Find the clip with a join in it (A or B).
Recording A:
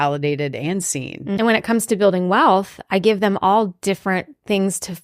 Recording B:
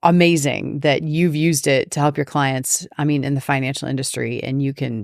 A